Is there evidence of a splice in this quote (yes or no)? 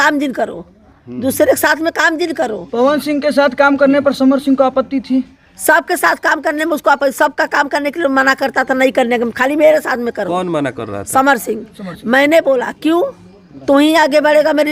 no